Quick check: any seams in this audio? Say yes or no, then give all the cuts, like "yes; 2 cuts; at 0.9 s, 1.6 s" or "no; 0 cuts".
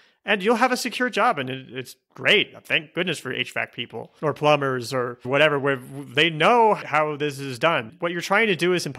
yes; 1 cut; at 7.9 s